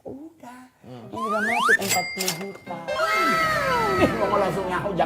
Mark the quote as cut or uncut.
uncut